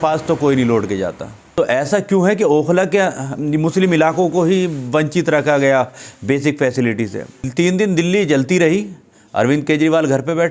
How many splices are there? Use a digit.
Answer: 2